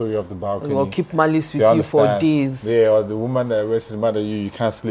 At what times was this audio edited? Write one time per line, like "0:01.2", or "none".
none